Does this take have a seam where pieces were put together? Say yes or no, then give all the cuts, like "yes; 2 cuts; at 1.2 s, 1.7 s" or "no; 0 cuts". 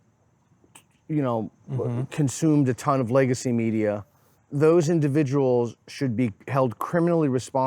yes; 1 cut; at 4.4 s